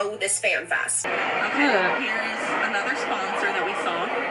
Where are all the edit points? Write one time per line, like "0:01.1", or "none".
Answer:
0:01.0

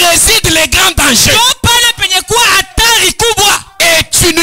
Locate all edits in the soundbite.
none

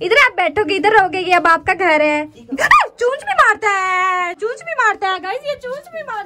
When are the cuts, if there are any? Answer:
none

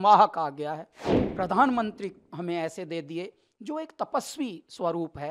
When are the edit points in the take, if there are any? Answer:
0:01.0

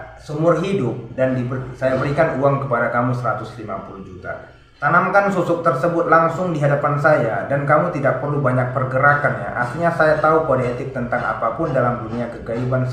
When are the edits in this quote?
none

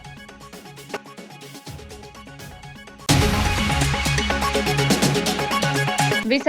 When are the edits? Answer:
none

